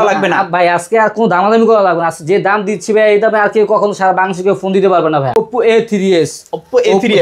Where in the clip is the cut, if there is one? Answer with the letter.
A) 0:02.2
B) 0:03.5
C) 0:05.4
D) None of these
C